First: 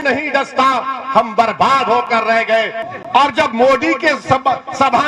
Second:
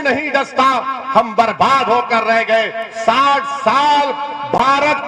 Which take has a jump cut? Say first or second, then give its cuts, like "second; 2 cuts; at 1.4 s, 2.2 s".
first; 1 cut; at 2.8 s